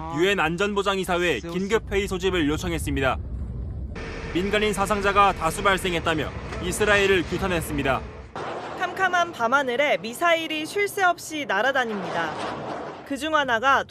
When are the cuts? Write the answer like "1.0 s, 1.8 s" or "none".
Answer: 8.4 s